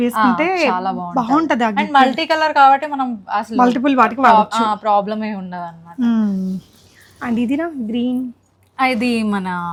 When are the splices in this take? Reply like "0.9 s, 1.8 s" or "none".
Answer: none